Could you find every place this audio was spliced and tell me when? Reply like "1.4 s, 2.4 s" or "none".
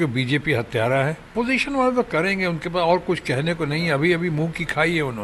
1.3 s